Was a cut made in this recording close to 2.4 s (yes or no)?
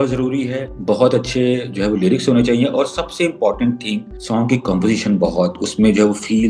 no